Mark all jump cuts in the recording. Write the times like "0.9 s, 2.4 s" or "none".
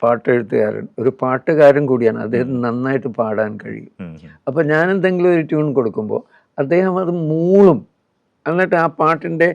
none